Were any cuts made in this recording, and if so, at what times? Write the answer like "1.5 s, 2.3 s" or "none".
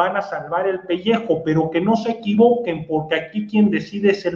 none